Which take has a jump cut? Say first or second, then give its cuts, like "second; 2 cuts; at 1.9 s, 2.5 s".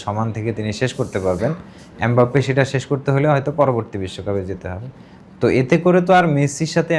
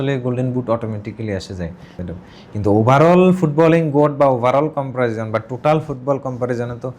second; 1 cut; at 2.0 s